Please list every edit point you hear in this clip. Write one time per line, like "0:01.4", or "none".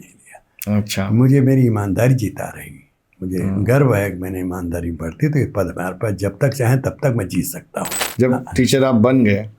0:08.0

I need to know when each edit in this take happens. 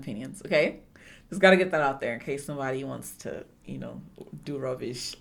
none

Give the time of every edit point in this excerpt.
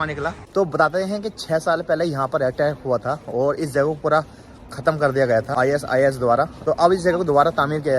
0:00.7
0:05.5
0:06.5

